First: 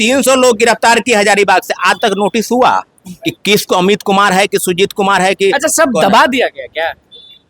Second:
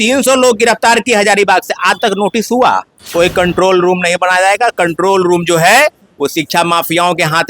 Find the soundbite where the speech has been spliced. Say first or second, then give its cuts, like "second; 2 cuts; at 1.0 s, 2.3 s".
second; 1 cut; at 3.0 s